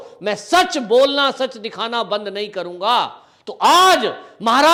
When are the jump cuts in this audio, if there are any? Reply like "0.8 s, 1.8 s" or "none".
none